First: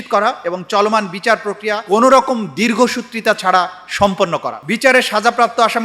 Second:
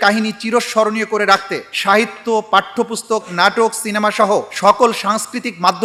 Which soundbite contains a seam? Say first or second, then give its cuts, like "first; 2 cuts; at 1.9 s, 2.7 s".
first; 1 cut; at 4.5 s